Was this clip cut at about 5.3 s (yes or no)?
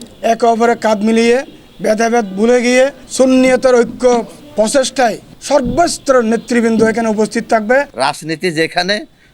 no